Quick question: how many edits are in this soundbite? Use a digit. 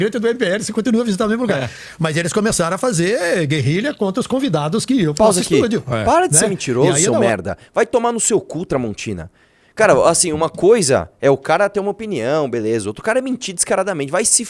0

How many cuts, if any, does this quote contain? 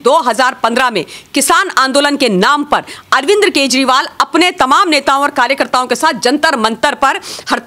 0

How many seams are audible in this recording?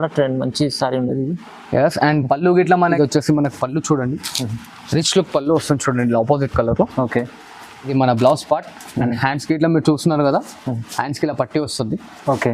2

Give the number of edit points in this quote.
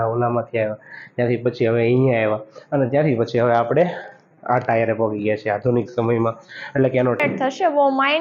1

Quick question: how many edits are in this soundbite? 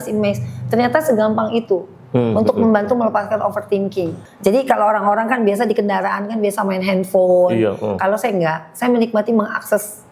1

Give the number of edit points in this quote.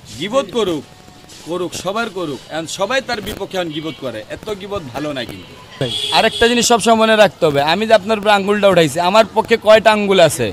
1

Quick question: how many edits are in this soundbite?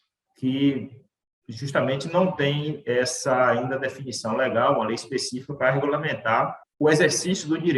1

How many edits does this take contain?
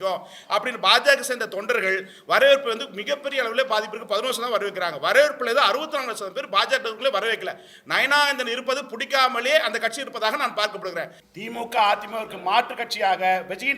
1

